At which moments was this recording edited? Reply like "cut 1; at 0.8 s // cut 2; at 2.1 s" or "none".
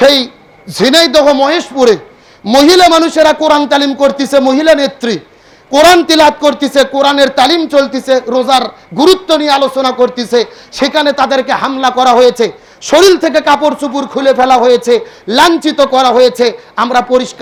none